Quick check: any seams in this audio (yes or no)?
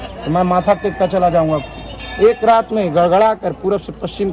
no